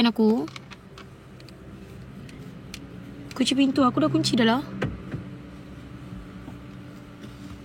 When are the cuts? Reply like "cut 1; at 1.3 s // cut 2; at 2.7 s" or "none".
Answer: none